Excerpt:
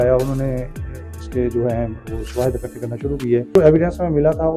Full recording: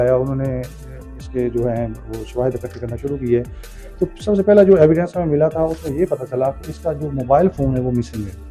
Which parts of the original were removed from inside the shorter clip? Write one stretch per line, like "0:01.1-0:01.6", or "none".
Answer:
0:03.6-0:04.7